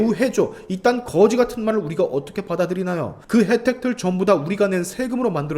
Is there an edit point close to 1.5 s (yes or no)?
no